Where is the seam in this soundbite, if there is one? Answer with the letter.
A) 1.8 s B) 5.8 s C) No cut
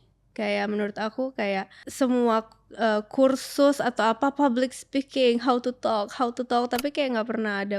A